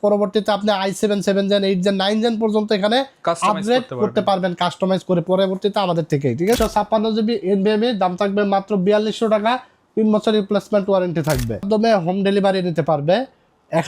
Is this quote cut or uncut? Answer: cut